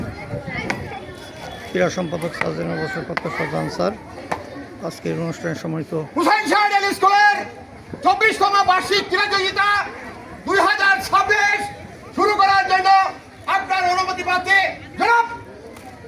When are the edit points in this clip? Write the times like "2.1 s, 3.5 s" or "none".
none